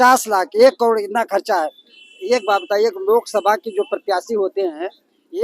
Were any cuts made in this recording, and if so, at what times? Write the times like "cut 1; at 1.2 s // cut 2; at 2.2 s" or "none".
none